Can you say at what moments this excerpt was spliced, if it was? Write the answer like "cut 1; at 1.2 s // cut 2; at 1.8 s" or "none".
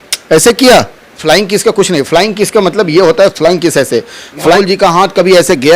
cut 1; at 1.2 s // cut 2; at 4.6 s